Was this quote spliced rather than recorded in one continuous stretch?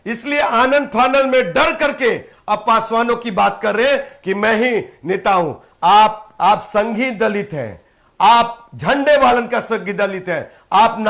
no; 0 cuts

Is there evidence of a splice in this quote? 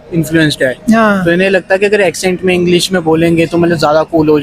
no; 0 cuts

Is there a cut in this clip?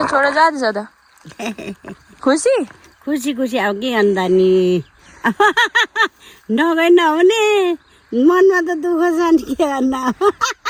no; 0 cuts

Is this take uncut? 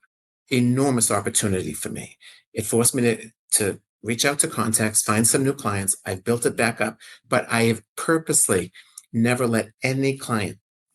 yes; 0 cuts

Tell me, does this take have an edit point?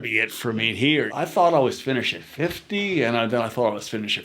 yes; 1 cut; at 1.1 s

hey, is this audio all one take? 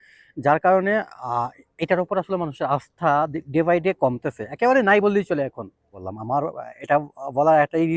no; 1 cut; at 6.1 s

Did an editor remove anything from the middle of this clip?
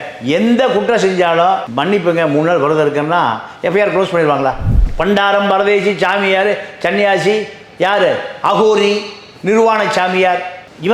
yes; 1 cut; at 4.7 s

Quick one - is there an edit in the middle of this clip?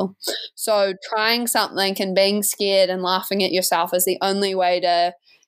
no; 0 cuts

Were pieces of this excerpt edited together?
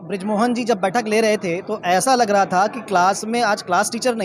no; 0 cuts

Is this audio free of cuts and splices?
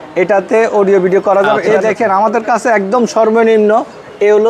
no; 1 cut; at 1.6 s

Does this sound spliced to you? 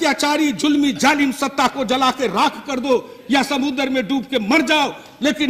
no; 0 cuts

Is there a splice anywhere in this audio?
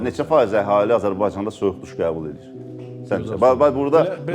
no; 0 cuts

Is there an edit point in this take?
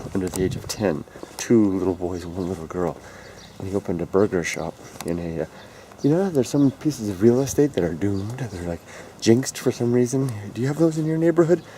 yes; 1 cut; at 10.6 s

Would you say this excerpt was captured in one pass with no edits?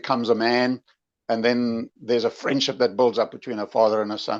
yes; 0 cuts

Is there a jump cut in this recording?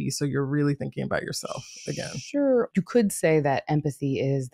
yes; 1 cut; at 2.7 s

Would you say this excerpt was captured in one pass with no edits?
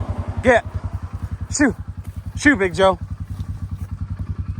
no; 1 cut; at 3.6 s

